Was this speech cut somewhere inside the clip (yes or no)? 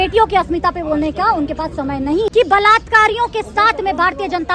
yes